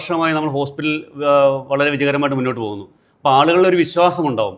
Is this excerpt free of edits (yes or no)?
yes